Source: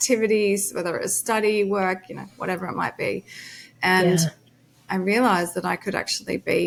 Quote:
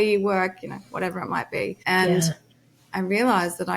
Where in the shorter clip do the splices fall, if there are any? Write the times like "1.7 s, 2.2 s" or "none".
1.8 s